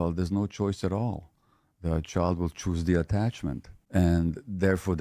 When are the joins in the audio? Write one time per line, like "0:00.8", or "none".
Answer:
0:03.7